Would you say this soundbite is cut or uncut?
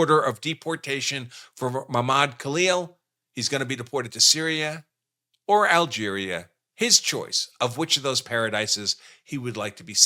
uncut